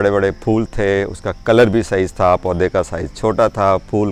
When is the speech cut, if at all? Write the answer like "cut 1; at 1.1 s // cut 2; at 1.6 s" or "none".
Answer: none